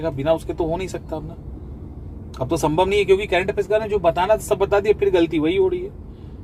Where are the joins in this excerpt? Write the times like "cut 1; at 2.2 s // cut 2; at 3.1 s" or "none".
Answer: none